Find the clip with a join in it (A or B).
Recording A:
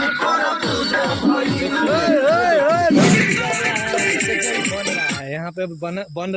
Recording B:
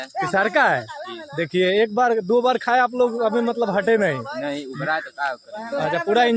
A